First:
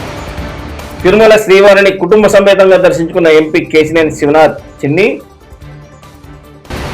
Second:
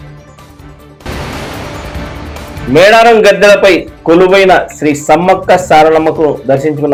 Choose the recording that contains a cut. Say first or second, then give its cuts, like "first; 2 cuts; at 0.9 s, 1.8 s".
first; 1 cut; at 1.0 s